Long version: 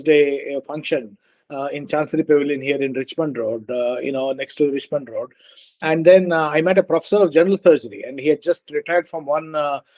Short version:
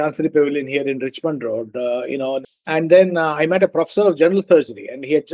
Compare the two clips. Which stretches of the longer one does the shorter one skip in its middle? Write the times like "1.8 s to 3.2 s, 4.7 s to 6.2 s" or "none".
4.5 s to 5.7 s